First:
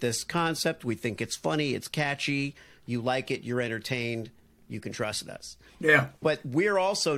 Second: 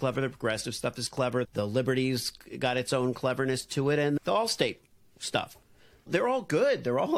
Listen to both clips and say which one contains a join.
second; 1 cut; at 1.5 s

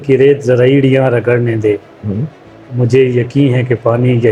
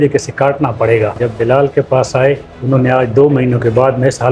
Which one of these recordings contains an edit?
second; 2 cuts; at 1.1 s, 2.5 s

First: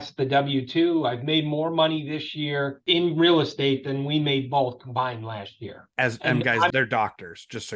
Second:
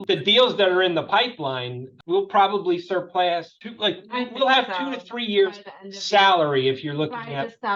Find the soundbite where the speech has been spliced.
first; 3 cuts; at 2.8 s, 5.9 s, 6.7 s

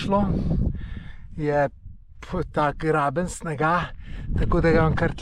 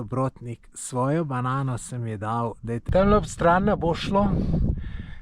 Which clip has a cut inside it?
second; 1 cut; at 2.8 s

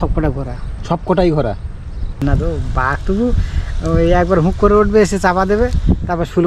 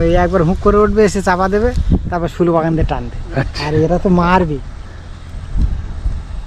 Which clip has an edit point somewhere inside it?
first; 1 cut; at 2.2 s

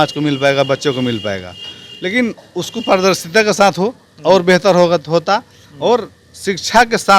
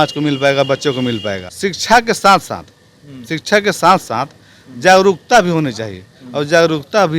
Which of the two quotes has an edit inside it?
second; 1 cut; at 1.4 s

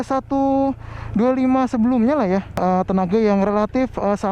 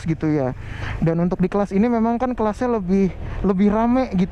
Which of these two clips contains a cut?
first; 1 cut; at 2.6 s

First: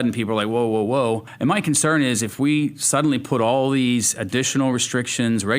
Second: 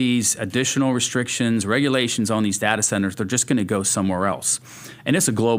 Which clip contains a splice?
first; 1 cut; at 1.3 s

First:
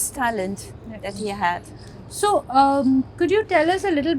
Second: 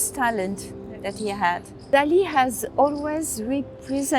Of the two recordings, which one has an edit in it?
second; 1 cut; at 1.9 s

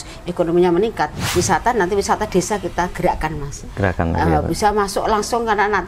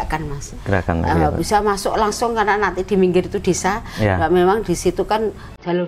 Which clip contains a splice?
first; 1 cut; at 1.2 s

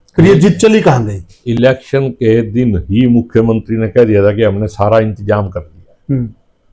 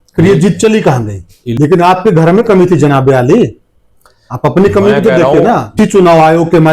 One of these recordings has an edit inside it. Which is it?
second; 2 cuts; at 1.4 s, 5.7 s

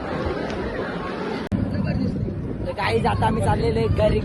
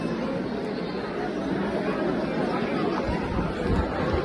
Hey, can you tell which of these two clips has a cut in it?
first; 1 cut; at 1.5 s

